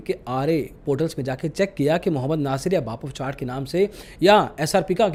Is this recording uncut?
yes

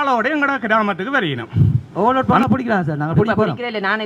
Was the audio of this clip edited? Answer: yes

